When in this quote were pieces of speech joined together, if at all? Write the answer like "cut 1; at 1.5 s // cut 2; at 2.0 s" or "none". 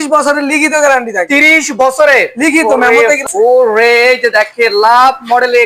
cut 1; at 3.3 s